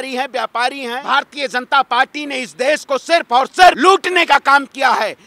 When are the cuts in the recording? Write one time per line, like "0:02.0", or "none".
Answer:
0:01.0
0:03.8